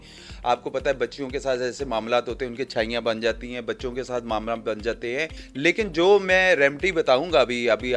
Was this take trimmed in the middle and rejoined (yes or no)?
yes